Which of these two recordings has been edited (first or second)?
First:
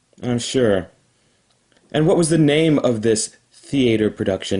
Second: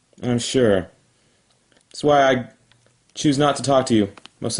first